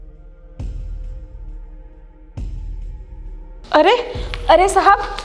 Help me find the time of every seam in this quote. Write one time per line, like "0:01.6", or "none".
0:03.7